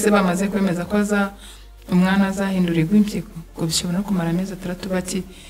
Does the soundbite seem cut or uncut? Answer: uncut